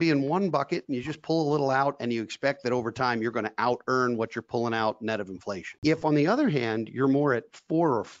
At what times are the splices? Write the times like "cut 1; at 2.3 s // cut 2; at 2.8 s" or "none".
cut 1; at 5.7 s